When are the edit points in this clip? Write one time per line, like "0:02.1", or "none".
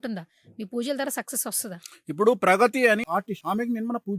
0:03.0